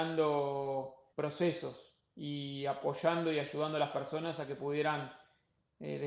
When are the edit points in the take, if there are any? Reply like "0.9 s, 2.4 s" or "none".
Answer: 1.0 s